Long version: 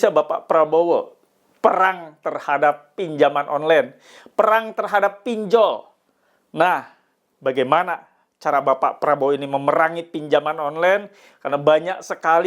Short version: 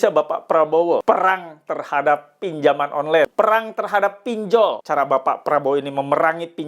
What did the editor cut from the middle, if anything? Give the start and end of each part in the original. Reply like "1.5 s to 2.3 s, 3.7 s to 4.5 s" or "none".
1.0 s to 1.6 s, 3.9 s to 4.3 s, 5.8 s to 8.4 s